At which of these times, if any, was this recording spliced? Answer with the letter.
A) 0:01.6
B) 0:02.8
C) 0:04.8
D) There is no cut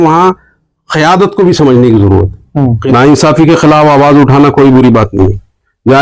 B